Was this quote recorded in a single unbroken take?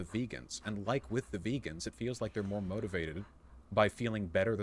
no; 1 cut; at 1.1 s

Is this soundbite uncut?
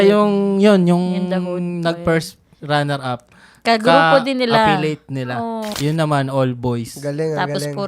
no; 1 cut; at 5.7 s

